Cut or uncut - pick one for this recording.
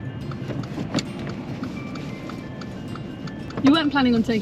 cut